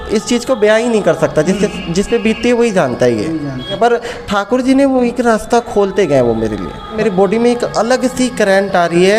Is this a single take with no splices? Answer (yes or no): no